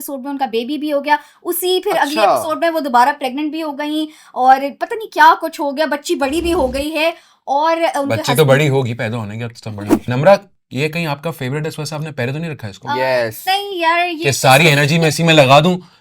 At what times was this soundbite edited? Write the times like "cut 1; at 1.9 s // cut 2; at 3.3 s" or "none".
cut 1; at 10.0 s

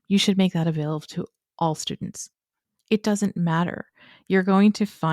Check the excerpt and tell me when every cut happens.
cut 1; at 2.2 s

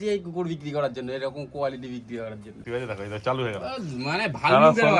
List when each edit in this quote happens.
cut 1; at 2.6 s

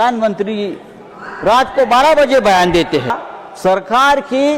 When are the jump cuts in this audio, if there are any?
cut 1; at 3.1 s

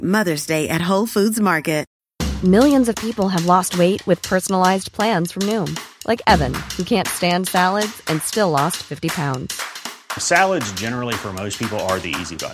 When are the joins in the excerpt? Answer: cut 1; at 1.9 s

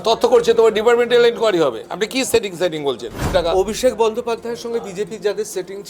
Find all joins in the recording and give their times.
cut 1; at 3.3 s

